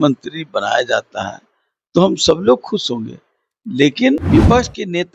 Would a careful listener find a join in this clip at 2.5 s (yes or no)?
no